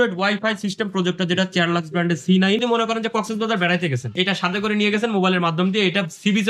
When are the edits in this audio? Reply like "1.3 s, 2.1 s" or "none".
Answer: 2.6 s, 4.2 s